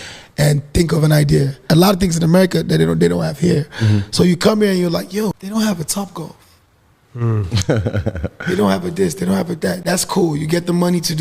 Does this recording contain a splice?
yes; 3 cuts; at 1.6 s, 5.4 s, 9.8 s

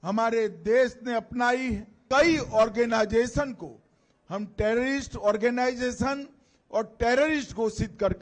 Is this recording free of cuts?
no; 1 cut; at 2.0 s

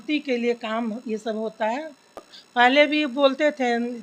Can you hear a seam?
yes; 1 cut; at 2.3 s

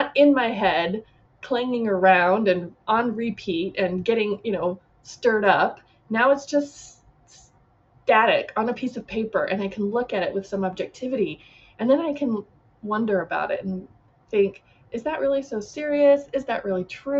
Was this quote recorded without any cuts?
yes; 0 cuts

